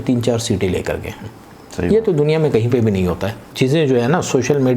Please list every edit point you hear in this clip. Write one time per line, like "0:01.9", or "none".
0:03.4